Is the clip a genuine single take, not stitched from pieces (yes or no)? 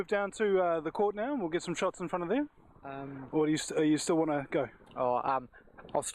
no